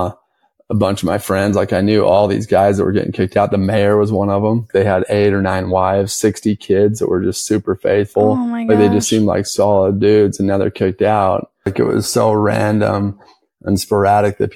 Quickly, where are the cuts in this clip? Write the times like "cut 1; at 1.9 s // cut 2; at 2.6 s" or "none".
cut 1; at 4.7 s // cut 2; at 11.7 s